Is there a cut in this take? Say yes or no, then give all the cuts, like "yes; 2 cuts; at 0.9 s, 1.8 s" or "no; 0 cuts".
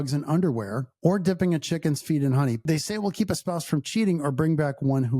yes; 1 cut; at 2.6 s